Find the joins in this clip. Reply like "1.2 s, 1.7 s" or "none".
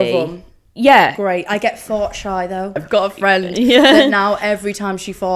2.8 s